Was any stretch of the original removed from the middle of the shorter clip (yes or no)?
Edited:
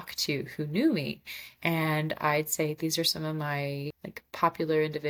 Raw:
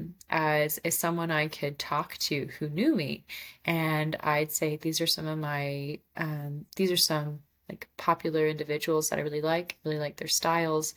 yes